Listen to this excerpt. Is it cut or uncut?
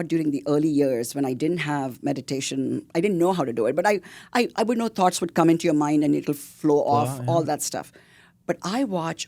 uncut